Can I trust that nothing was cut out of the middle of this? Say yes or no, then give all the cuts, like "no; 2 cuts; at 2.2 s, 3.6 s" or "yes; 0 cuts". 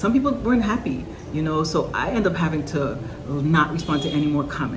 yes; 0 cuts